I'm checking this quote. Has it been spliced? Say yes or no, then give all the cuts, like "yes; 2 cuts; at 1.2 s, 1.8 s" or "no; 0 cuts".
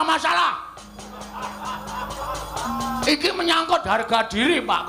no; 0 cuts